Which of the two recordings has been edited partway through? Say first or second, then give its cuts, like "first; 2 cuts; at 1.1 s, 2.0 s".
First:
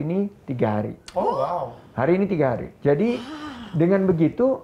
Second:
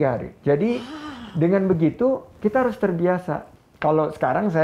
second; 1 cut; at 3.5 s